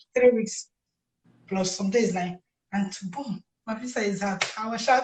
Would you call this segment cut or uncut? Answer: uncut